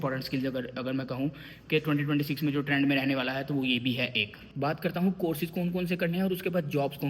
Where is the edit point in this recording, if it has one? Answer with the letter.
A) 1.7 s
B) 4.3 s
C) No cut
B